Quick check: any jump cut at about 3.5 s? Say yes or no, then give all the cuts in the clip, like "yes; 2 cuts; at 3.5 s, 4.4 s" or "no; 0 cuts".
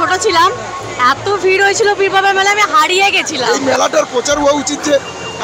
yes; 1 cut; at 3.5 s